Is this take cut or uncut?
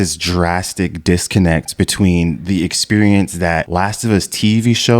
cut